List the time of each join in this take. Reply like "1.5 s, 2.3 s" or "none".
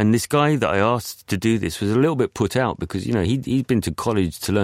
none